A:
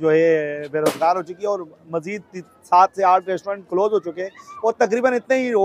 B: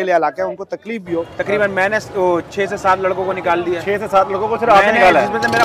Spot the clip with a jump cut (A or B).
B